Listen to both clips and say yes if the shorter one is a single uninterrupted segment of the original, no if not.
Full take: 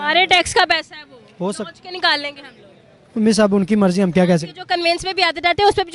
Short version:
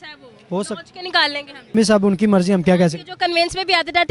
no